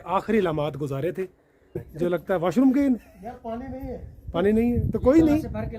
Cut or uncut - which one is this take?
cut